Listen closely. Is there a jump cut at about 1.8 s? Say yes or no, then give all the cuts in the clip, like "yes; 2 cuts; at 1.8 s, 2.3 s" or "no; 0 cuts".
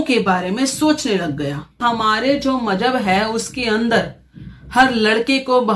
yes; 1 cut; at 1.8 s